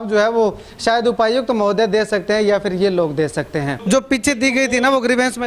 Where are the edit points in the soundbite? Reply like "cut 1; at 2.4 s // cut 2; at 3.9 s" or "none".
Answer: cut 1; at 3.8 s